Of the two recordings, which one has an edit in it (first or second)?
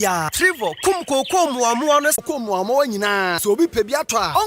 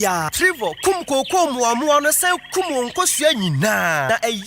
first